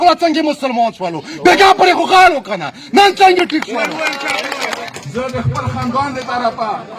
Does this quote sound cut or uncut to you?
cut